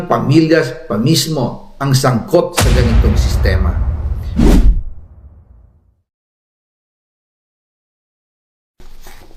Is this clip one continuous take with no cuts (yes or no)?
yes